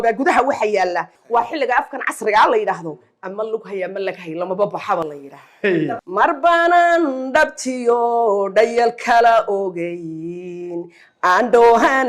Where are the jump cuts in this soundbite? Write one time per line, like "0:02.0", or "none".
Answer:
0:01.2
0:05.9